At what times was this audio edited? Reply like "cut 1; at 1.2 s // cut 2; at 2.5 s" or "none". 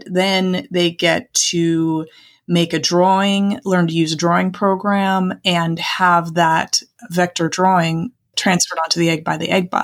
cut 1; at 8.3 s